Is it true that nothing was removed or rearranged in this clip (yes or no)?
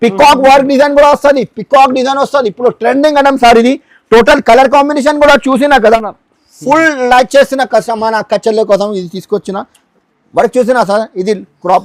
no